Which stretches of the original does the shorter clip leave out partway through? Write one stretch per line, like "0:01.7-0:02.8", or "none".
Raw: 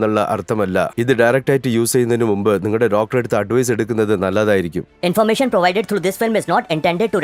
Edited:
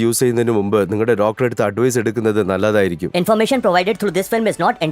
0:04.8-0:04.9